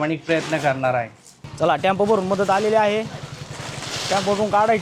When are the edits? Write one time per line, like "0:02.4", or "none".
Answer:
none